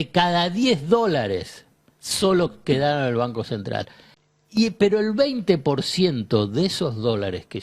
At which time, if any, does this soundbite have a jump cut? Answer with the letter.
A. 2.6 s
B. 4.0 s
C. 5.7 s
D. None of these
B